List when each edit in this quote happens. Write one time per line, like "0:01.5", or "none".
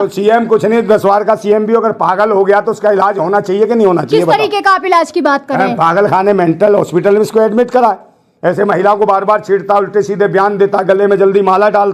none